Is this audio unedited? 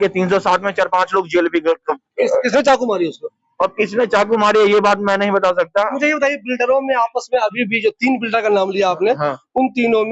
yes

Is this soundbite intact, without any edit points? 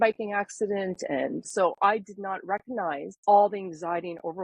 no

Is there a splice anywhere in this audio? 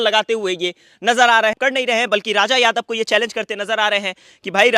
yes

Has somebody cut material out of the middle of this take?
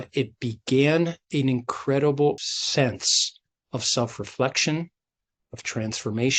yes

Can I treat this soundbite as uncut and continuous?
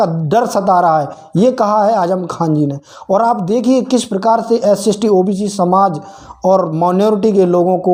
yes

